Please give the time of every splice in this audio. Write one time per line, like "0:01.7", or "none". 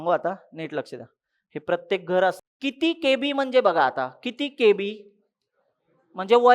0:02.4